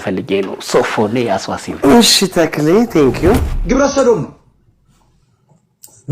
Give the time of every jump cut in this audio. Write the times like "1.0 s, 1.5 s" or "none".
3.5 s